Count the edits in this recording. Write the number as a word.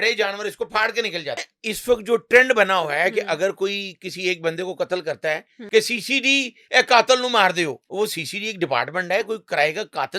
three